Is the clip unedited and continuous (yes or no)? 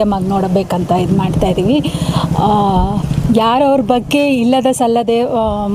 yes